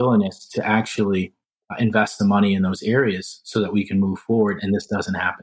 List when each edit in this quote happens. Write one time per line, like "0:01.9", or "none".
none